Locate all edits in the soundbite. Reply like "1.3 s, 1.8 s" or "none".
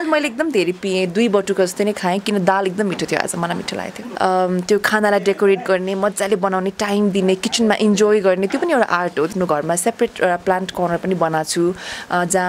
4.0 s, 9.3 s